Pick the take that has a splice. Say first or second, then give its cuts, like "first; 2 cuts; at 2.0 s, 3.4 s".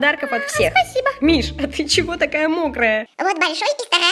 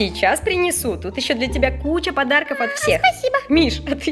first; 1 cut; at 3.0 s